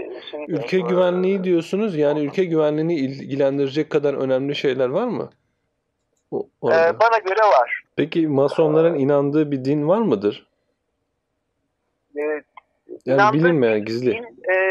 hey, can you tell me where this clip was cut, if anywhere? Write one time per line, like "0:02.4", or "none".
0:07.8